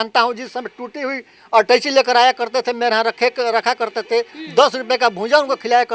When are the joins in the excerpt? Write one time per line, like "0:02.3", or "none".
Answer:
none